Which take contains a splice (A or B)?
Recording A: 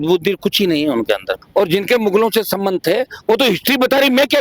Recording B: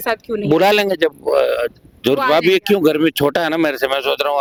A